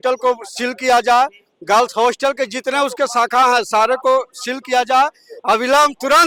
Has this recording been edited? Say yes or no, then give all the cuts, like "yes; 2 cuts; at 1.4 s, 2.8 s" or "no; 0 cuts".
no; 0 cuts